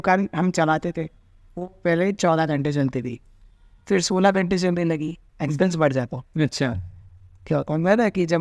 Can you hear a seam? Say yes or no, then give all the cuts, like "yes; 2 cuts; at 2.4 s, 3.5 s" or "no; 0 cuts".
no; 0 cuts